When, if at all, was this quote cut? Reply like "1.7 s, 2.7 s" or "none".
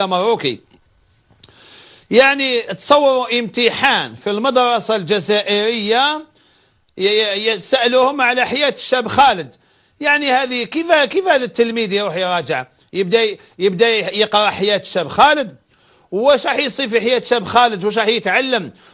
15.4 s